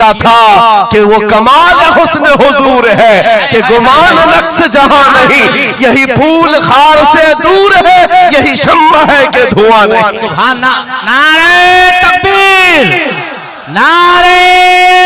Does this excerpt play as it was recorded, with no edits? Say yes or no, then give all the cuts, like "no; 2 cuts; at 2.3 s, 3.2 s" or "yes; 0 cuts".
yes; 0 cuts